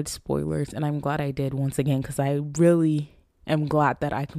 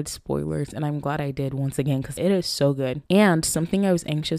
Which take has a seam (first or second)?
second